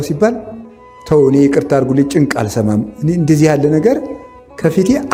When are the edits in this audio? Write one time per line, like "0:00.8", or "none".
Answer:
none